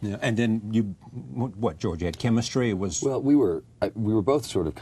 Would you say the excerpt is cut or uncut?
cut